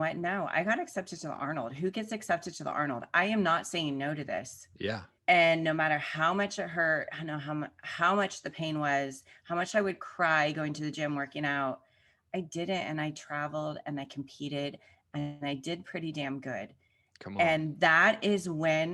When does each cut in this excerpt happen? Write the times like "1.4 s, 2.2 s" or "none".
5.1 s